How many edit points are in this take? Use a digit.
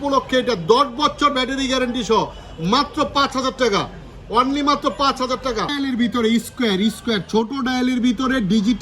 1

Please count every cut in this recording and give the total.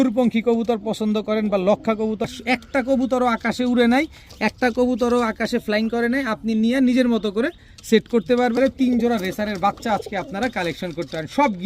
2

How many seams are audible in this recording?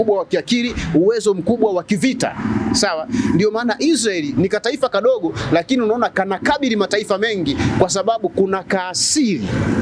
0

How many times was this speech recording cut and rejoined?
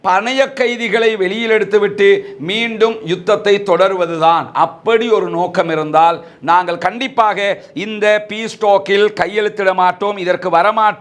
0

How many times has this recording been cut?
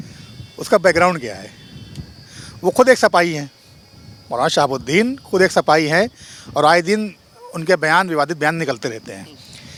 0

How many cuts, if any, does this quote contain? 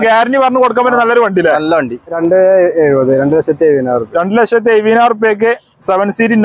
1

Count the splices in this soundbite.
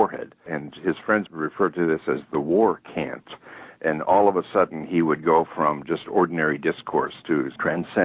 1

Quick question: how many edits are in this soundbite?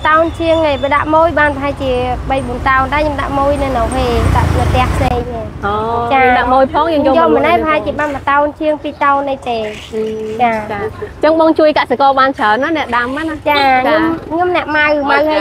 0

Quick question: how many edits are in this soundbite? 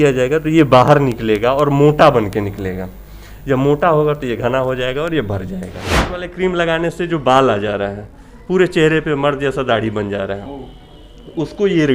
1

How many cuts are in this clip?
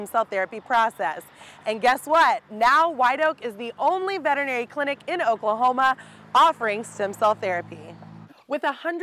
1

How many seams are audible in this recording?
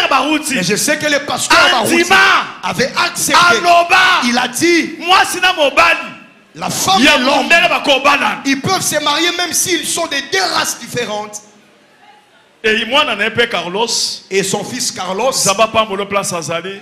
0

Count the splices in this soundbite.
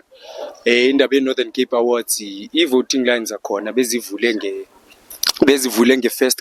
0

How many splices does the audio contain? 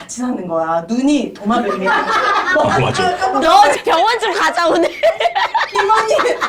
0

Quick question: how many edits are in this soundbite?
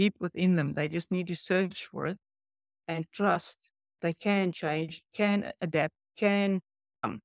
3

